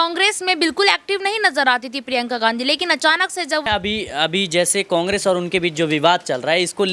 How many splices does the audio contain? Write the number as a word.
one